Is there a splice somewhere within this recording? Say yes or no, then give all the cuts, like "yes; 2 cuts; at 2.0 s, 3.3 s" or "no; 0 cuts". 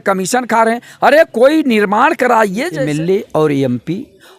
yes; 1 cut; at 2.7 s